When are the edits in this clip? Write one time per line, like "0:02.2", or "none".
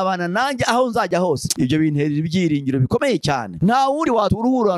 0:03.5